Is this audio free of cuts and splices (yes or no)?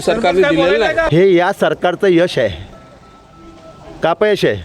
no